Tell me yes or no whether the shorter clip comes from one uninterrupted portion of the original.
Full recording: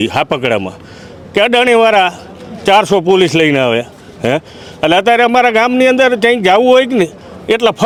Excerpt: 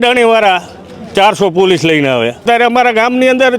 no